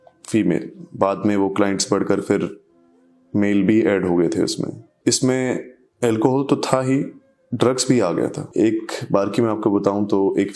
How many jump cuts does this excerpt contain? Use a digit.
2